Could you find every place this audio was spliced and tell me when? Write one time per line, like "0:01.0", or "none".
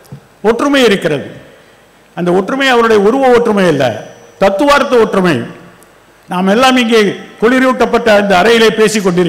none